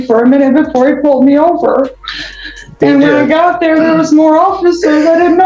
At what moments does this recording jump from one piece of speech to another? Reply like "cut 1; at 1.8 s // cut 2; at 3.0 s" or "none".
none